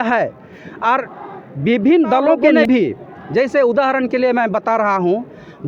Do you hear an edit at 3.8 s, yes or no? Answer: no